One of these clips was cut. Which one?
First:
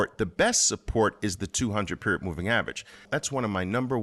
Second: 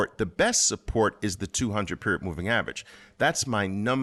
first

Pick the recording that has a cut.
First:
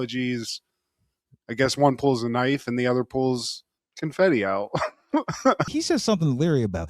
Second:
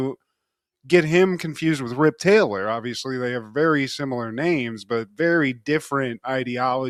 first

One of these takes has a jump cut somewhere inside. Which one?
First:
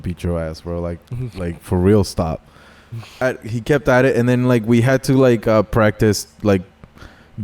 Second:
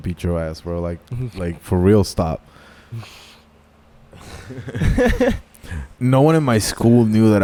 first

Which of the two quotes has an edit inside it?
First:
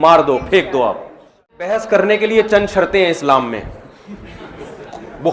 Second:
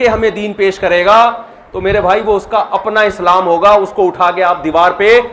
first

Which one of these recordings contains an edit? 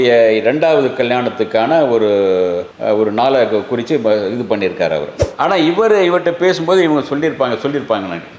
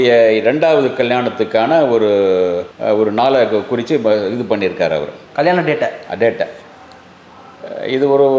first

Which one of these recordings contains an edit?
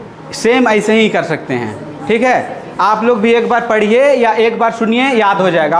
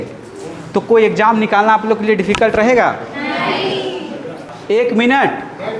second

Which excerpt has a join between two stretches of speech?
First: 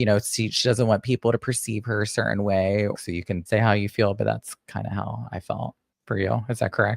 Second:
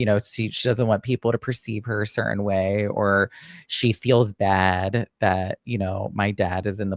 first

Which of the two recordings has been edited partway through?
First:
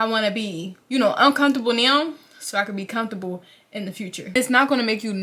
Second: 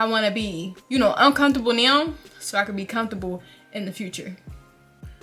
first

